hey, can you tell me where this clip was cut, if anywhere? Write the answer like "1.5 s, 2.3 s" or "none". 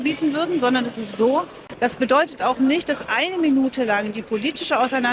1.6 s